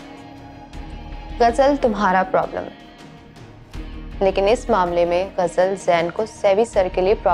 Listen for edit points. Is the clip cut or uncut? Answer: uncut